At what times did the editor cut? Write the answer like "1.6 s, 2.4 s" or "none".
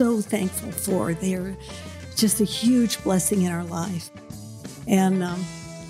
none